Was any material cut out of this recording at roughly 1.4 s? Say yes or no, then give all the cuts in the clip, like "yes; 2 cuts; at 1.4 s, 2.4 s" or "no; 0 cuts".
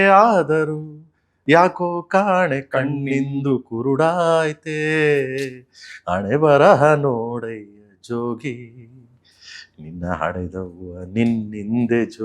yes; 1 cut; at 1.4 s